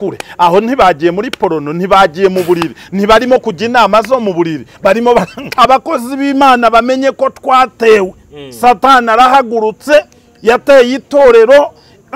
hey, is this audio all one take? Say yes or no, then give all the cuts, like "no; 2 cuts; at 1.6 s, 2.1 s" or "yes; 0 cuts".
no; 1 cut; at 5.4 s